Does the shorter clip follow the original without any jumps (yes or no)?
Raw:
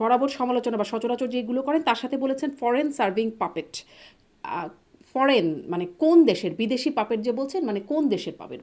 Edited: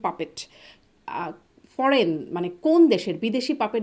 yes